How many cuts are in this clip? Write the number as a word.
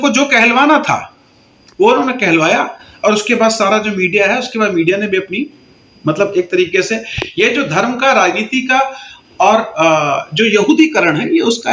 zero